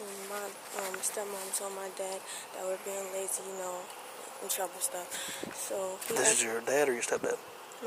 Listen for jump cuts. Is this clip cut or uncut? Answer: uncut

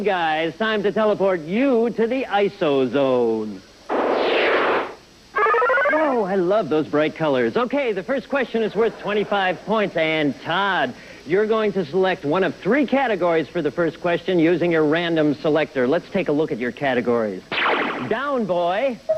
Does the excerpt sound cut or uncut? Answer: cut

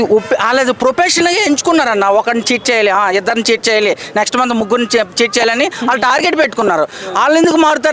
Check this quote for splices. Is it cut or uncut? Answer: uncut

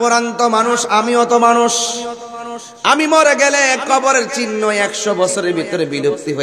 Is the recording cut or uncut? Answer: uncut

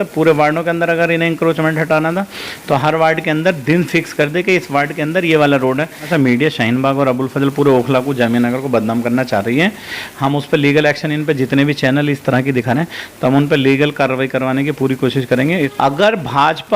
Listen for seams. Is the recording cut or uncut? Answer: cut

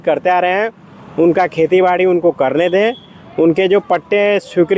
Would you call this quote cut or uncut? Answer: uncut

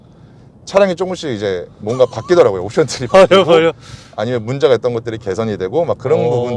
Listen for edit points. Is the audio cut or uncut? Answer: uncut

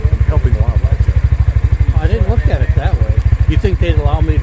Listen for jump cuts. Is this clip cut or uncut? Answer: cut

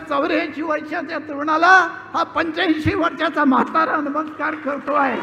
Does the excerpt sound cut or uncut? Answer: uncut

